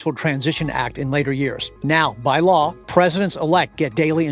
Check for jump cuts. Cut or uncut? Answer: cut